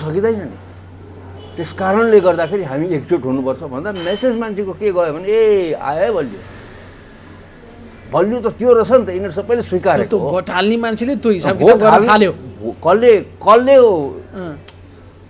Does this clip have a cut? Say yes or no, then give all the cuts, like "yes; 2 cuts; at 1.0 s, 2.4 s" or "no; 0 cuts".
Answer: no; 0 cuts